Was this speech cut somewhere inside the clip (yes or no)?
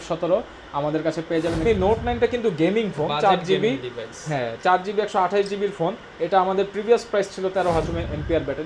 yes